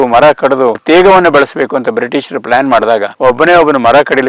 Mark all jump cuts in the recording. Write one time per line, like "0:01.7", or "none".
0:00.8
0:03.1